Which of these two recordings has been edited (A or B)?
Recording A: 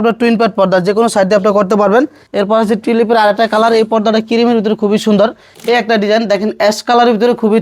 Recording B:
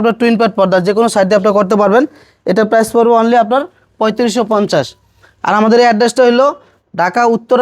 A